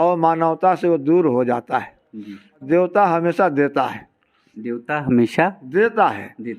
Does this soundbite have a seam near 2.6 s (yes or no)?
yes